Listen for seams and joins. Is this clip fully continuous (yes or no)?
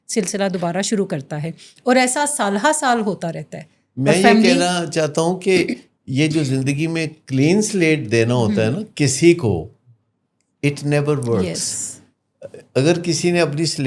yes